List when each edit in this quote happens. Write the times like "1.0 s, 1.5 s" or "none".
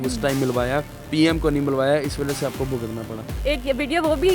3.4 s